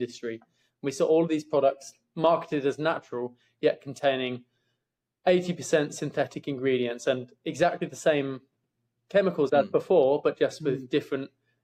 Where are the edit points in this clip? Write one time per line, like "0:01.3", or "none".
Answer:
none